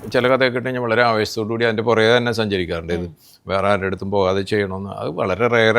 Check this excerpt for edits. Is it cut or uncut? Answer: uncut